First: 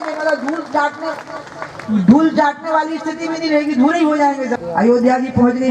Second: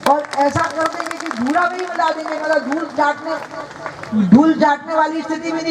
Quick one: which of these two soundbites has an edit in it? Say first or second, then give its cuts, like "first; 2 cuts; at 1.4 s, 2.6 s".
first; 1 cut; at 4.5 s